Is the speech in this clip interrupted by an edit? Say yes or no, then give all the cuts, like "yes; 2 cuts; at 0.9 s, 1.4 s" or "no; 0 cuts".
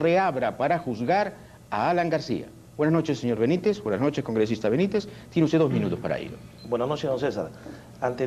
no; 0 cuts